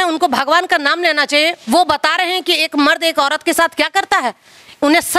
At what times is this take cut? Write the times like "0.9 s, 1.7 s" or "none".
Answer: none